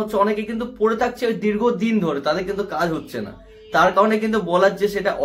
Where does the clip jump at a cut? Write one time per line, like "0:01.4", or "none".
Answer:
none